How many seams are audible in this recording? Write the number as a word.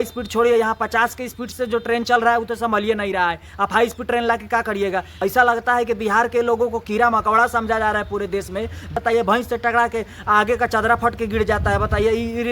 two